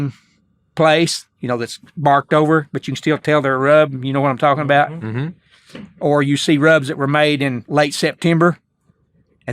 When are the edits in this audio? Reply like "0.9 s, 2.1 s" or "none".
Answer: 7.6 s